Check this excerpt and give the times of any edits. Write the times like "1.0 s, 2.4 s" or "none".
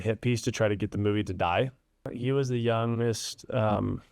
2.1 s

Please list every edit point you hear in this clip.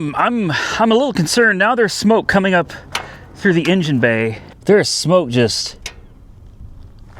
4.5 s

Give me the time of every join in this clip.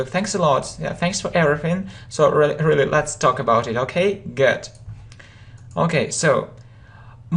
5.4 s

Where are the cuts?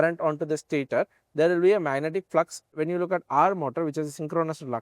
2.7 s

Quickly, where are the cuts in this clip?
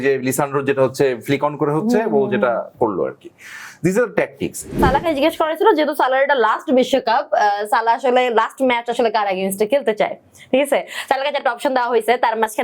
4.8 s

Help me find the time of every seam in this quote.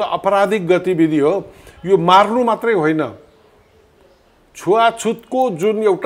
none

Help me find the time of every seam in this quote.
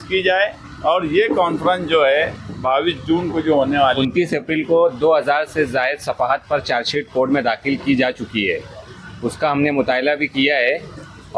4.0 s

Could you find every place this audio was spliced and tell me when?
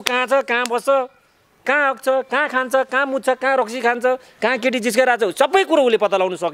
1.6 s

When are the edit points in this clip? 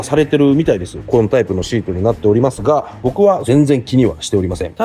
1.0 s

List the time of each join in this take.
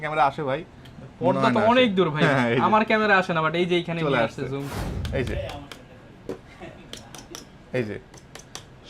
4.7 s

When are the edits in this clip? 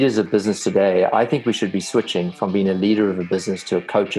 none

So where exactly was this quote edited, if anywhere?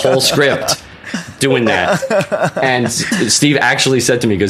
3.0 s

